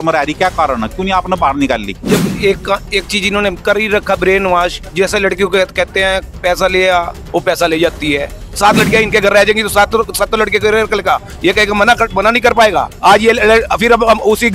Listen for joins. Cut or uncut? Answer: cut